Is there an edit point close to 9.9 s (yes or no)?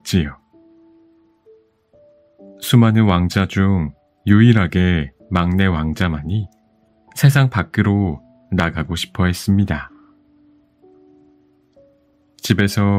yes